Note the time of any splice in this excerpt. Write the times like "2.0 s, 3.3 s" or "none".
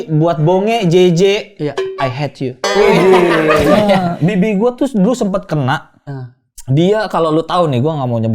3.7 s